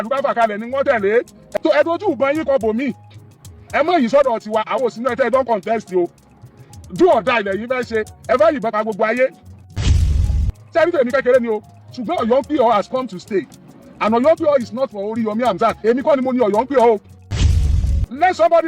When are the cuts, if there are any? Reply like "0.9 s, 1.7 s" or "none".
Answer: 1.4 s, 10.0 s, 17.6 s